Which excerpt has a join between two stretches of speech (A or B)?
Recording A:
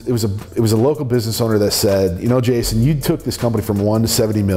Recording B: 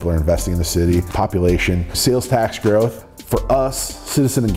B